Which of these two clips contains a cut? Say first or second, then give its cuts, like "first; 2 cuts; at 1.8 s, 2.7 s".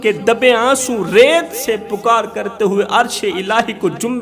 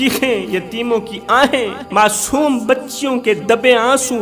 second; 1 cut; at 1.8 s